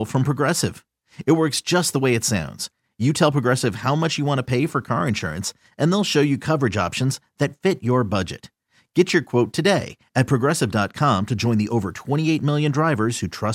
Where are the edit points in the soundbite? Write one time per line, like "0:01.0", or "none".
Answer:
none